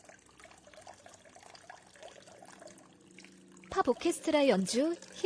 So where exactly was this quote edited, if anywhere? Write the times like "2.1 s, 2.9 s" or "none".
3.7 s